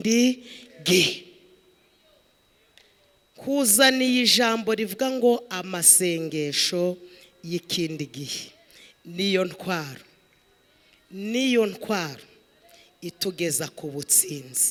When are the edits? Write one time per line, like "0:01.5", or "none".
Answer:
none